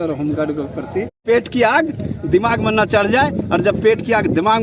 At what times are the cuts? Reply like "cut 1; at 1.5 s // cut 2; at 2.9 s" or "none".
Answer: cut 1; at 1.1 s